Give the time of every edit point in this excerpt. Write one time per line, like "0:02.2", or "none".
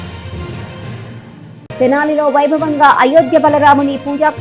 0:01.8